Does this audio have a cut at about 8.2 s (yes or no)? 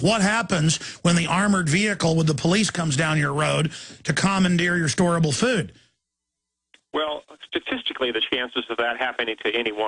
yes